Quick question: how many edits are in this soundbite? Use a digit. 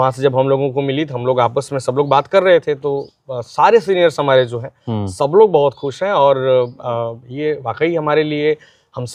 0